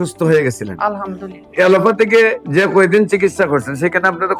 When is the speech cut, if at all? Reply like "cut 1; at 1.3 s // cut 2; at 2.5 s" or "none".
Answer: cut 1; at 1.5 s